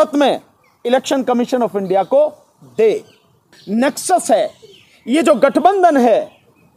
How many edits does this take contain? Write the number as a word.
one